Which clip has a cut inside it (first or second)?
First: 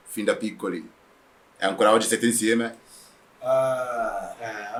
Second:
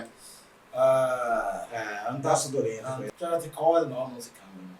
second